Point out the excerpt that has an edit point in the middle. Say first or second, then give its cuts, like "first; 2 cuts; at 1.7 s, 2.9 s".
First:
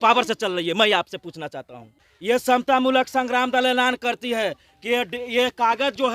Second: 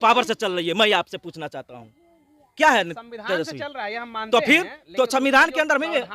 first; 1 cut; at 2.1 s